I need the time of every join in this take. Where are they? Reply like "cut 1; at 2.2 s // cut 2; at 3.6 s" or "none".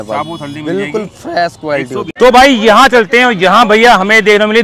cut 1; at 2.1 s